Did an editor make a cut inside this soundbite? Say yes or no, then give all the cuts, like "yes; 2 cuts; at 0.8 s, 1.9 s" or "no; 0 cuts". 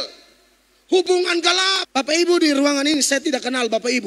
yes; 1 cut; at 1.8 s